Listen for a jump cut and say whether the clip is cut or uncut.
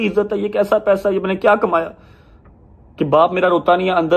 uncut